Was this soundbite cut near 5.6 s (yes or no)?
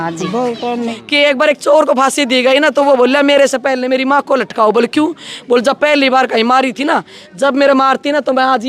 no